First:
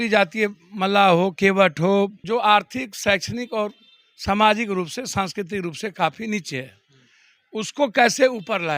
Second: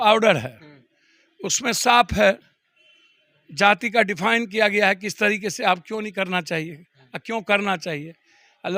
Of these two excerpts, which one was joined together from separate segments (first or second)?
first